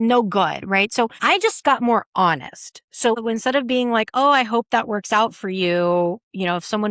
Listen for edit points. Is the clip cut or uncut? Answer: cut